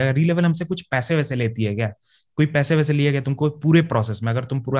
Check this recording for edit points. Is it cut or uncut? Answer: uncut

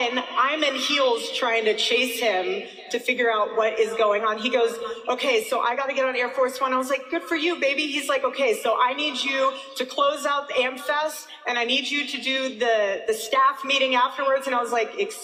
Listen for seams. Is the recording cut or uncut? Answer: uncut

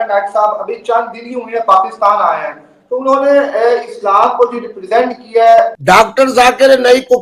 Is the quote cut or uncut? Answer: cut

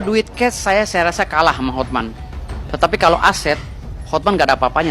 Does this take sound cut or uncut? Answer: uncut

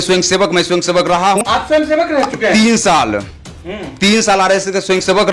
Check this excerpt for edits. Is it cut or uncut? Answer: cut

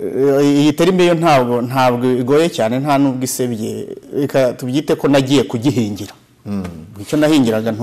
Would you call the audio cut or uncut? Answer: uncut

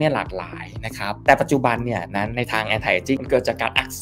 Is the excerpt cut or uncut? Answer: cut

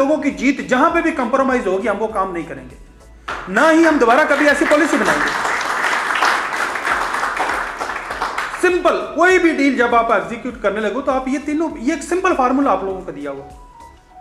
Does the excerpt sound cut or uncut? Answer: uncut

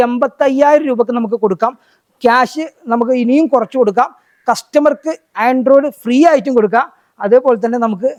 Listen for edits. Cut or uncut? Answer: uncut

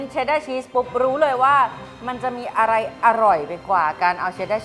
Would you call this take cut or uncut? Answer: uncut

